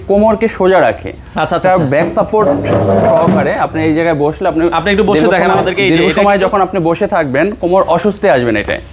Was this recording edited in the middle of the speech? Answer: no; 0 cuts

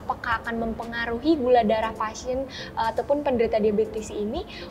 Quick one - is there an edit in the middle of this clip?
no; 0 cuts

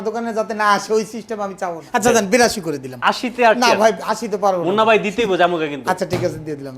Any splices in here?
yes; 1 cut; at 1.8 s

